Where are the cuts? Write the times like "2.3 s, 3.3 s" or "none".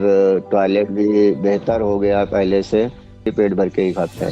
3.3 s